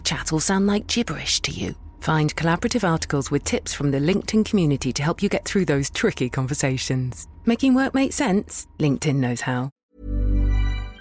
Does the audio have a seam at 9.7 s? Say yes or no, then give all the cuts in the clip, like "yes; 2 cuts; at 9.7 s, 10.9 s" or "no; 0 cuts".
yes; 1 cut; at 9.7 s